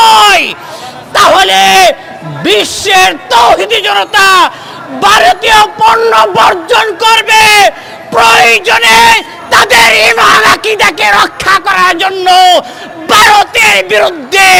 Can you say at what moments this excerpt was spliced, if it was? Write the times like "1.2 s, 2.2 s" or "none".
none